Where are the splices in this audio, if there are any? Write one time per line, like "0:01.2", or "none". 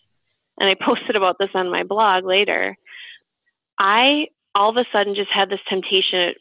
0:03.2